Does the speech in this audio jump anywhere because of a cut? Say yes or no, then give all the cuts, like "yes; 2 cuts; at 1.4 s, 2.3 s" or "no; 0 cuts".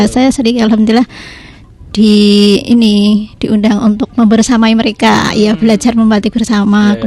no; 0 cuts